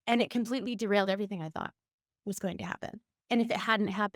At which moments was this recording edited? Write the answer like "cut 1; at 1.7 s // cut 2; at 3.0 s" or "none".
cut 1; at 3.1 s